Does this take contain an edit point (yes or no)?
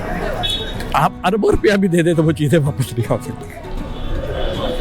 no